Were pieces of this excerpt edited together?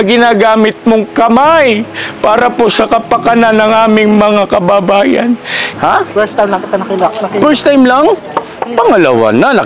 yes; 1 cut; at 5.7 s

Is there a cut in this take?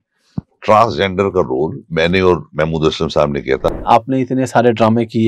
yes; 1 cut; at 3.7 s

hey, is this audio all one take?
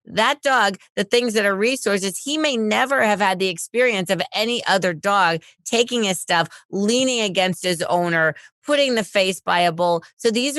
yes; 0 cuts

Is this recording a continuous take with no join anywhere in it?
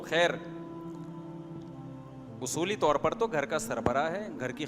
no; 2 cuts; at 0.8 s, 2.4 s

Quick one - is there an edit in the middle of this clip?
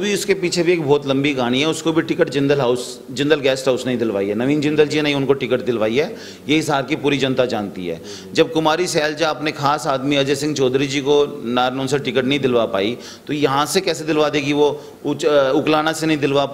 no; 0 cuts

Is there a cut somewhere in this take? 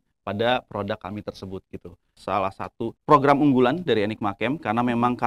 yes; 2 cuts; at 2.2 s, 3.0 s

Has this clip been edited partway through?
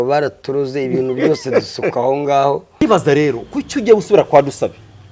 yes; 1 cut; at 2.8 s

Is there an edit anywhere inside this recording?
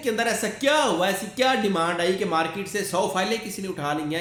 no; 0 cuts

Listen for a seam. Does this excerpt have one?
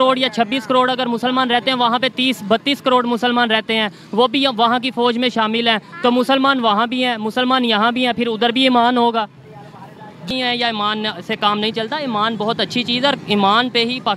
yes; 1 cut; at 10.3 s

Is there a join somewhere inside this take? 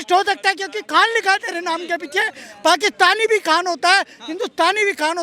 no; 0 cuts

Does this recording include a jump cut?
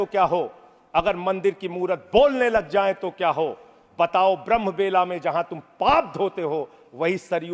no; 0 cuts

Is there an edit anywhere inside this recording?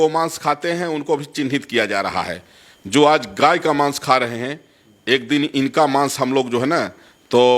no; 0 cuts

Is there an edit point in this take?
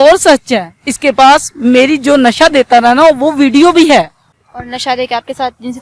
no; 0 cuts

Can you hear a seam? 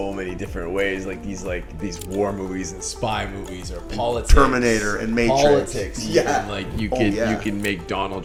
no; 0 cuts

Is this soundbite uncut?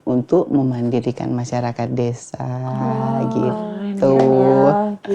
yes; 0 cuts

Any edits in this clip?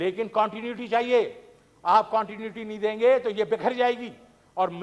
no; 0 cuts

